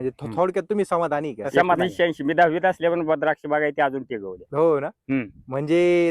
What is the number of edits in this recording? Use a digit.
1